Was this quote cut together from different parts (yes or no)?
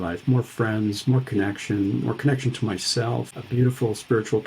yes